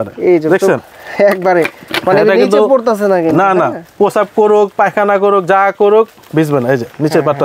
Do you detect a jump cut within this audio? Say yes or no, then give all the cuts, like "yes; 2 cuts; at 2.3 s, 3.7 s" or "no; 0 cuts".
no; 0 cuts